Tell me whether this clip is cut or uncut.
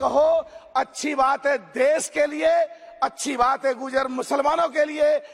uncut